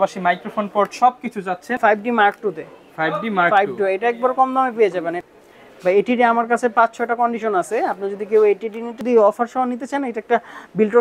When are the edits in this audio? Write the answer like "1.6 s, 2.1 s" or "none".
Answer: 1.7 s, 5.1 s, 9.0 s